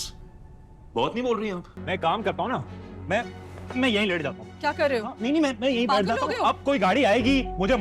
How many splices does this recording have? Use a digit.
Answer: 1